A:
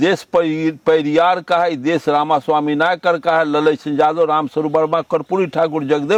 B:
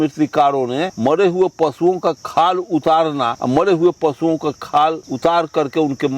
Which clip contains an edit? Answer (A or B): B